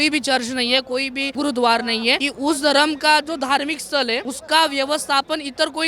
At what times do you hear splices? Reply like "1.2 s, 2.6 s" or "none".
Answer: 1.2 s, 2.3 s, 4.3 s